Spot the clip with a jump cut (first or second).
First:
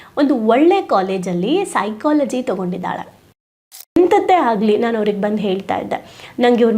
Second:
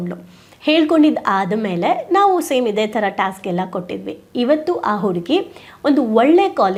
first